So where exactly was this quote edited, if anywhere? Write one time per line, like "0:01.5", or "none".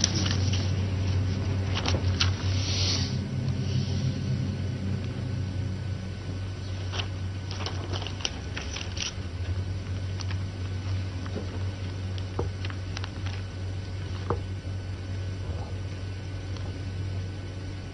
none